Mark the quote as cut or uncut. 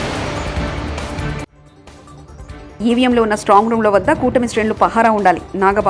uncut